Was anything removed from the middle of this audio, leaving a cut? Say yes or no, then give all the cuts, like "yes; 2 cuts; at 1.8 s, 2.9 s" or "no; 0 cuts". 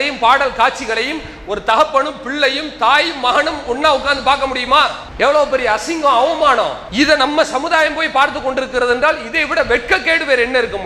yes; 2 cuts; at 5.0 s, 6.8 s